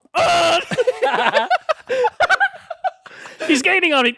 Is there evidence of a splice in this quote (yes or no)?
no